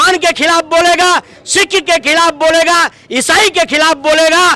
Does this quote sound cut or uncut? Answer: uncut